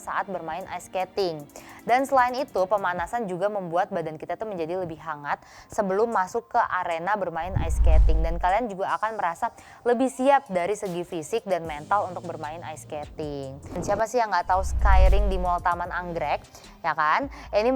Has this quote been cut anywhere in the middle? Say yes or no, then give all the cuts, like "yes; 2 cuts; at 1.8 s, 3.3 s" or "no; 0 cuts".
yes; 1 cut; at 13.8 s